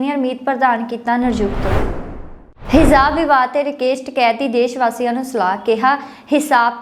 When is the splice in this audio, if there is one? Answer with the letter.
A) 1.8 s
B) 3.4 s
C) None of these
A